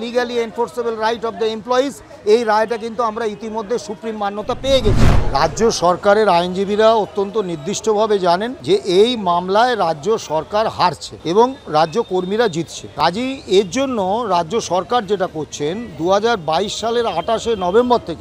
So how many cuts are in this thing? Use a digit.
4